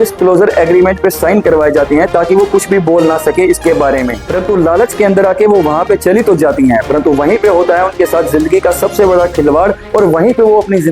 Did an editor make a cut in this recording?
yes; 1 cut; at 4.2 s

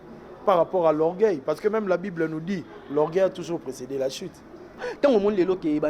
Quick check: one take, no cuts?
no; 1 cut; at 4.9 s

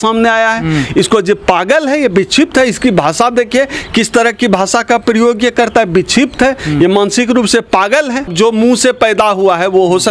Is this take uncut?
no; 1 cut; at 8.3 s

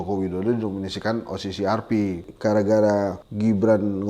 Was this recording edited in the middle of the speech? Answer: yes; 2 cuts; at 2.3 s, 3.2 s

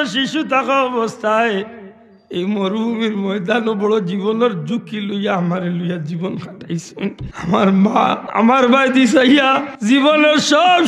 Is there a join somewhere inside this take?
yes; 3 cuts; at 7.3 s, 8.2 s, 9.7 s

